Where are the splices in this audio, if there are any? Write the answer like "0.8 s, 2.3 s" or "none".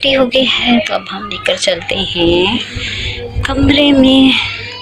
none